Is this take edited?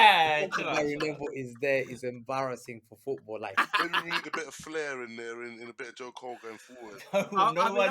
yes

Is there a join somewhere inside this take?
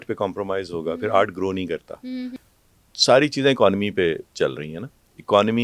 yes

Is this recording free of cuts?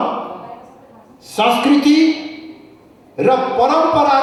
yes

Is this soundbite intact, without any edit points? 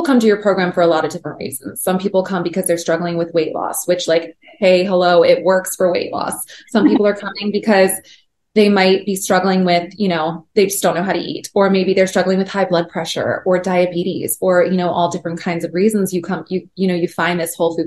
yes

